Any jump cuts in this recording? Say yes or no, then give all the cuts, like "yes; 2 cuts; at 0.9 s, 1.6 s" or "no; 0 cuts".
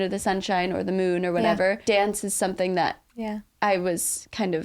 yes; 1 cut; at 1.8 s